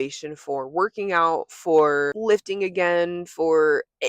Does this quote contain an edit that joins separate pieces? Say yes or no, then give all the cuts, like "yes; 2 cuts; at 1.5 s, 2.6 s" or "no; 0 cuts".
yes; 1 cut; at 2.2 s